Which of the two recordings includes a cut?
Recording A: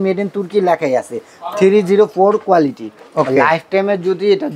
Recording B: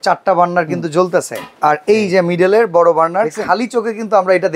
B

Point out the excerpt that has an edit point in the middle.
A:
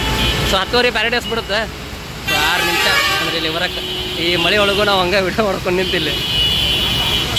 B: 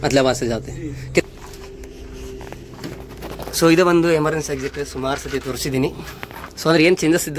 B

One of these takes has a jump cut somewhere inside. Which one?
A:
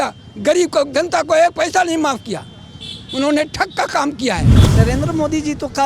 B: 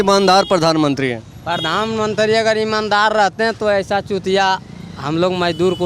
A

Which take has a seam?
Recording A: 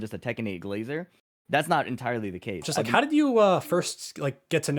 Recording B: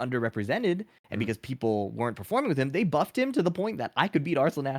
A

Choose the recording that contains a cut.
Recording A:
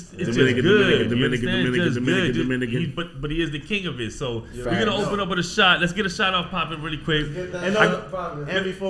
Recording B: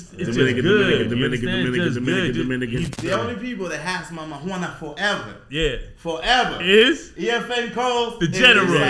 B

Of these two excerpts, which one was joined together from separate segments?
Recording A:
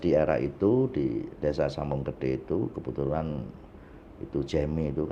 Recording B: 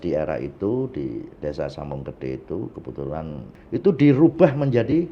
B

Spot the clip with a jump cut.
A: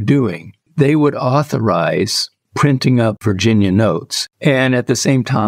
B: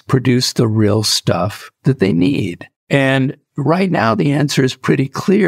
A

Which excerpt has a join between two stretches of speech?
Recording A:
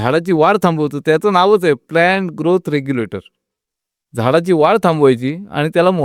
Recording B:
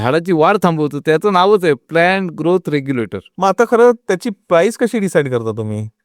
B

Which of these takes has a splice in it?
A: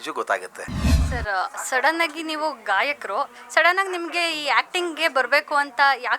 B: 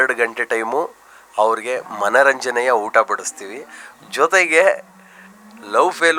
A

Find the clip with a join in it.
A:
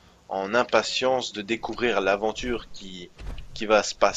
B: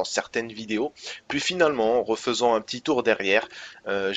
A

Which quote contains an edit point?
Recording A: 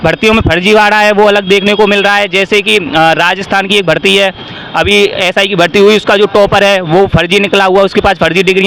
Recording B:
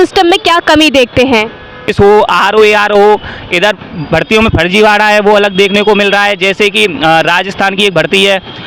B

